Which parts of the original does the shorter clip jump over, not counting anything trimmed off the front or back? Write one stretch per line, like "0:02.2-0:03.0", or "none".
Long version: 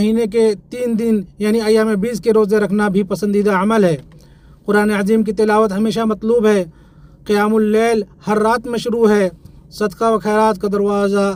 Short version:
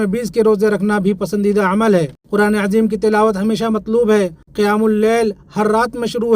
0:04.1-0:04.5
0:06.8-0:07.1